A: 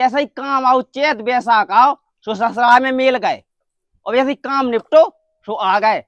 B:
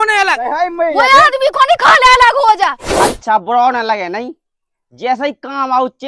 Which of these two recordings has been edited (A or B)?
B